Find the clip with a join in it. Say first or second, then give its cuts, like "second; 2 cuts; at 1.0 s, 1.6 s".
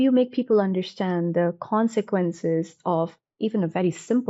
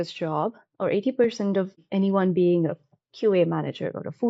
second; 1 cut; at 1.8 s